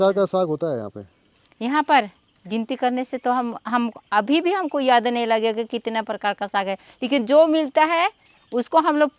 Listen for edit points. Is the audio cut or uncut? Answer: uncut